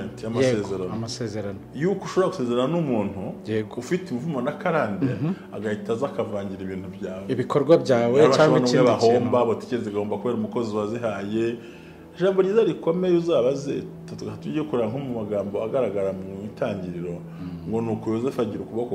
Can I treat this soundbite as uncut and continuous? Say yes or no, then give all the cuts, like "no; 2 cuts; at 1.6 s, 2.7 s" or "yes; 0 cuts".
yes; 0 cuts